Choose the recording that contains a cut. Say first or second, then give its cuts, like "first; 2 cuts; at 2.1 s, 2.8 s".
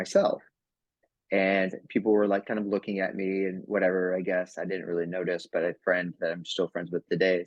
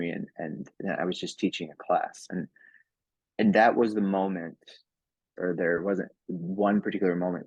second; 1 cut; at 5.2 s